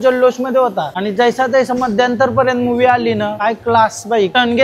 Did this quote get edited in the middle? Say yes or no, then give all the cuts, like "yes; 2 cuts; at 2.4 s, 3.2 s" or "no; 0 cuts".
no; 0 cuts